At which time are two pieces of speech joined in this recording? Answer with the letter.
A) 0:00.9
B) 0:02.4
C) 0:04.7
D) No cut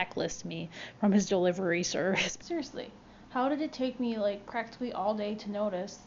B